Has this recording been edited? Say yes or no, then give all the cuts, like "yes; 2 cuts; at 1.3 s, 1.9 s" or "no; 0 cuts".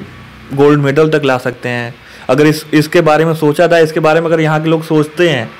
no; 0 cuts